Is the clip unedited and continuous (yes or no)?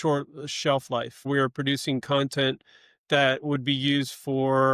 no